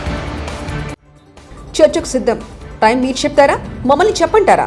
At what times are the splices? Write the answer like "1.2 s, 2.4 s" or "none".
1.0 s